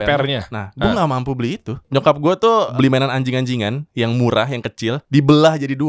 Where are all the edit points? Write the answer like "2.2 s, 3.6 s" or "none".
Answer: 1.7 s, 2.7 s, 5.0 s